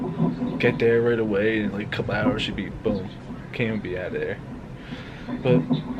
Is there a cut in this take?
no; 0 cuts

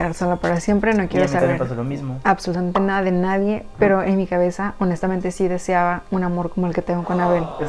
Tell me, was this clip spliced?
no; 0 cuts

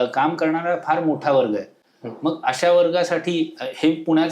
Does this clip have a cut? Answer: no; 0 cuts

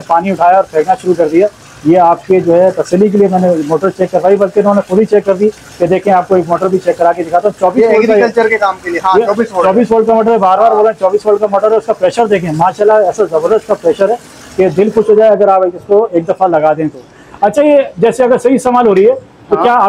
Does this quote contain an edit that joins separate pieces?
no; 0 cuts

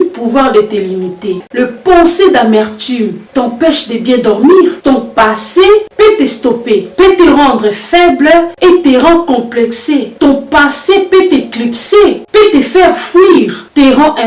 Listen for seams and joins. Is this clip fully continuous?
no; 2 cuts; at 1.4 s, 4.8 s

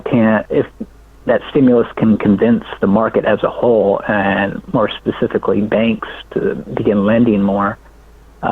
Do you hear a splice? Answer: no; 0 cuts

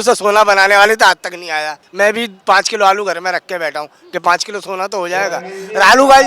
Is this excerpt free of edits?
no; 1 cut; at 1.8 s

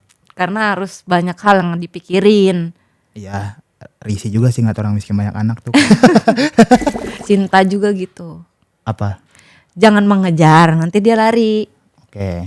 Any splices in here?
yes; 1 cut; at 7.1 s

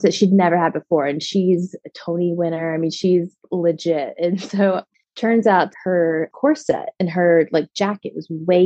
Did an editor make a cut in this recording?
yes; 2 cuts; at 4.9 s, 5.7 s

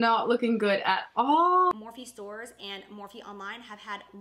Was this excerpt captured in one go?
no; 1 cut; at 1.7 s

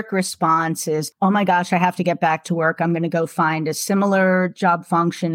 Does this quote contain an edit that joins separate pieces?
yes; 1 cut; at 1.1 s

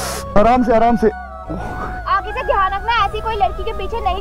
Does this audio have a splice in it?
yes; 1 cut; at 2.1 s

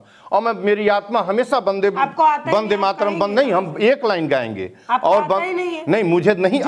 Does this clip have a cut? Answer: no; 0 cuts

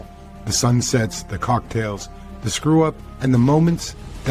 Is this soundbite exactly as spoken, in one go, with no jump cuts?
no; 1 cut; at 3.1 s

